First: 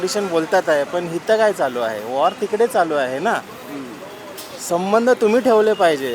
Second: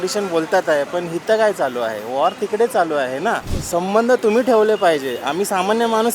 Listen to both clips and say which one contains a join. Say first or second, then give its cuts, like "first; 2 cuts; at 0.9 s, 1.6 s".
second; 1 cut; at 3.5 s